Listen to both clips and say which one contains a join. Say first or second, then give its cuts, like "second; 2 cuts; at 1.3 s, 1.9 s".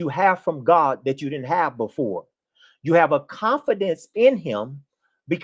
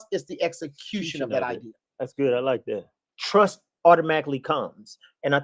second; 1 cut; at 2.8 s